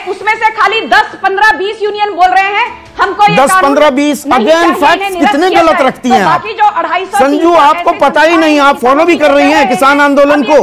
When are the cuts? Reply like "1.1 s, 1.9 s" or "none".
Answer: none